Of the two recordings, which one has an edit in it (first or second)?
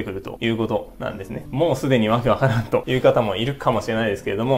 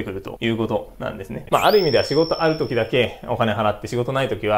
second